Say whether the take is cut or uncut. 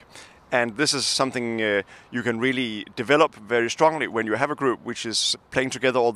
cut